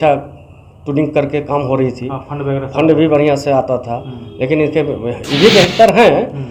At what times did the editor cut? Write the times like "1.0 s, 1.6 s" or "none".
none